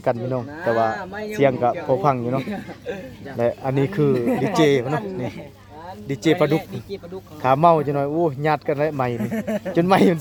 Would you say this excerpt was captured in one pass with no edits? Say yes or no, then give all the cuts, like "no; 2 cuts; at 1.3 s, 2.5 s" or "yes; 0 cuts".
yes; 0 cuts